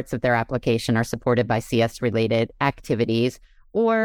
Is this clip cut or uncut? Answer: uncut